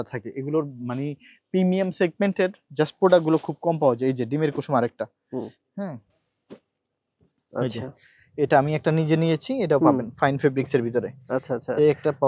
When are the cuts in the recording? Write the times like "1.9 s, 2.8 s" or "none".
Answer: none